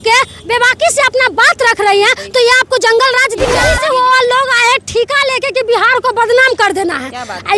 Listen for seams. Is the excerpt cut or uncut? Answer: cut